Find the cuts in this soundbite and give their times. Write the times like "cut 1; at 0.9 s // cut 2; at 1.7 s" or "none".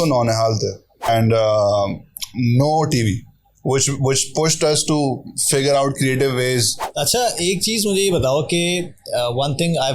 cut 1; at 1.1 s // cut 2; at 6.8 s